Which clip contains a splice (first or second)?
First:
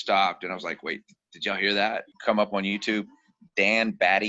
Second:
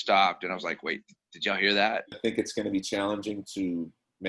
first